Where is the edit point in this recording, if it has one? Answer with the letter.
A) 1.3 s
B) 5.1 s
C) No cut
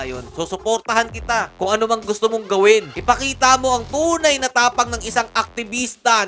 C